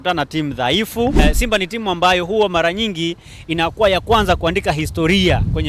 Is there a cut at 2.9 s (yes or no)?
no